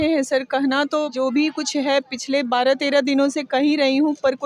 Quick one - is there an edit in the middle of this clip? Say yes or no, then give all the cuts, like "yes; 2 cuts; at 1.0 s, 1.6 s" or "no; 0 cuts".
yes; 1 cut; at 1.1 s